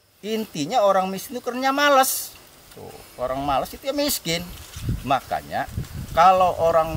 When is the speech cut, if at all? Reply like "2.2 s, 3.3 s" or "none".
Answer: none